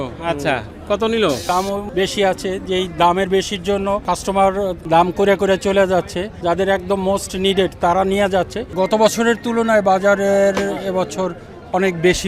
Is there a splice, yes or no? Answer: yes